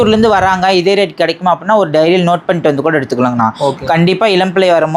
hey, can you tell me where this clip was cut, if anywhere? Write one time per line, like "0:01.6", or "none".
none